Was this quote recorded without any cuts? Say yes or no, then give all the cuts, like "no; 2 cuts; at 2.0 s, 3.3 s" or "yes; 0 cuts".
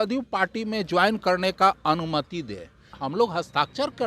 no; 1 cut; at 2.9 s